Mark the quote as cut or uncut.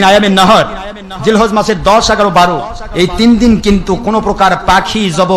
uncut